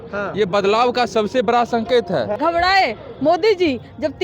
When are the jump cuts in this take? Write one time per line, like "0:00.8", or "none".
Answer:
0:02.3

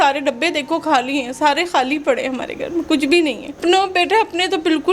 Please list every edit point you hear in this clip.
0:03.5

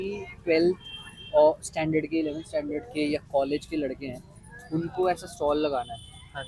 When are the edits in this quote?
none

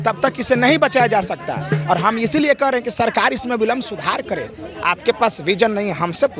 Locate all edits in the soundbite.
none

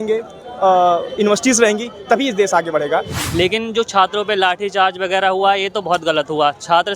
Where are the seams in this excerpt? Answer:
0:03.2

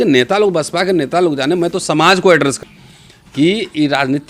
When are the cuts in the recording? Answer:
0:02.6

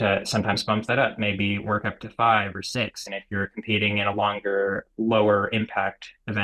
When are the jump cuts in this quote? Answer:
0:04.9

